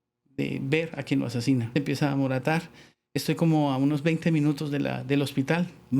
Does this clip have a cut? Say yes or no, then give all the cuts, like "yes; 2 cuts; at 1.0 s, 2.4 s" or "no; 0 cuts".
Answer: yes; 1 cut; at 1.7 s